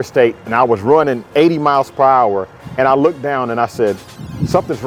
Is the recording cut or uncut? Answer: uncut